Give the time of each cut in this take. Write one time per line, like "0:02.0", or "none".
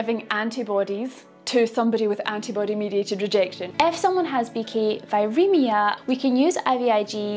0:03.6
0:06.0